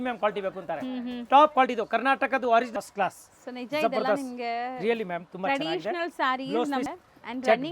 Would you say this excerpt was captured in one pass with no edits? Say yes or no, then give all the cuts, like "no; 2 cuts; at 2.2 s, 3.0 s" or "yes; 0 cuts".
no; 2 cuts; at 2.7 s, 6.9 s